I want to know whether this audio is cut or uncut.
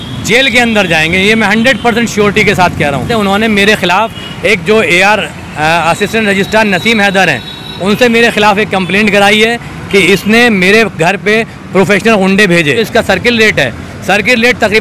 cut